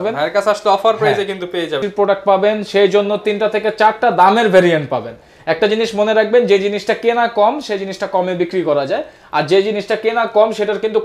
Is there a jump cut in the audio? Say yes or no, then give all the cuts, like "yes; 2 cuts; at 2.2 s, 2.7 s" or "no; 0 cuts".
yes; 1 cut; at 1.8 s